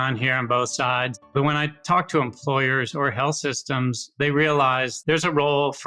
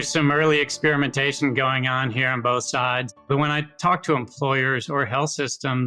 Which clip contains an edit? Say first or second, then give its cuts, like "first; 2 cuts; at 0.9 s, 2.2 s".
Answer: first; 1 cut; at 4.9 s